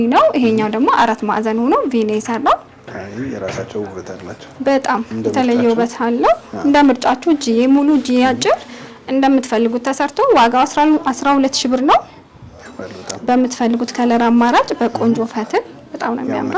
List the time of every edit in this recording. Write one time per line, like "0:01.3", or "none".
none